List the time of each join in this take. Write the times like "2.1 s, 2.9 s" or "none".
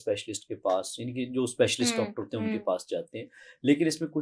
none